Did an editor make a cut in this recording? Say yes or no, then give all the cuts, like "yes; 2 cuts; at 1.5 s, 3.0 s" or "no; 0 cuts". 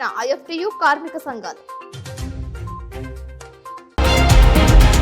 yes; 1 cut; at 3.9 s